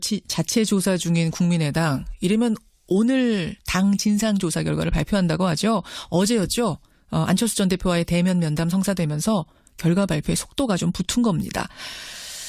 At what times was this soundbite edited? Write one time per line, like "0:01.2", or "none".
none